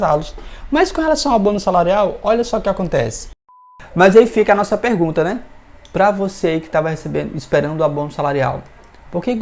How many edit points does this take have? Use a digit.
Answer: 1